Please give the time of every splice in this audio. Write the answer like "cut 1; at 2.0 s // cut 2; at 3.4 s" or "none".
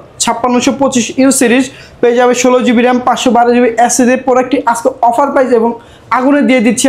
none